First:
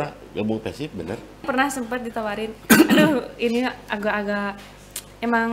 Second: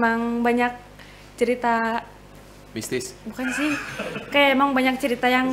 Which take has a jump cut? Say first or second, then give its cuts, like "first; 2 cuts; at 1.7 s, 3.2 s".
first; 1 cut; at 1.4 s